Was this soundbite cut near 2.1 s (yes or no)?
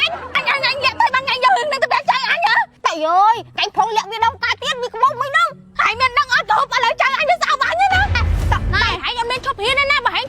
no